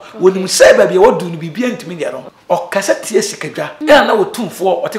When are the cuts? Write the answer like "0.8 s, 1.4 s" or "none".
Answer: 2.3 s, 3.7 s